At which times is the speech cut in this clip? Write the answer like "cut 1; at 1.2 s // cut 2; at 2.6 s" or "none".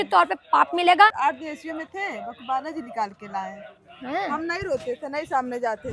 cut 1; at 1.2 s